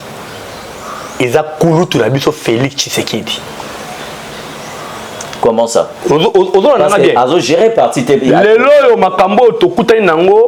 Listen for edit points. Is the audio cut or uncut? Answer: uncut